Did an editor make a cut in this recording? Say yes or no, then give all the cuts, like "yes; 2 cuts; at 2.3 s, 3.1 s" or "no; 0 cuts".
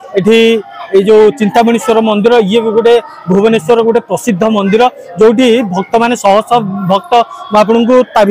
no; 0 cuts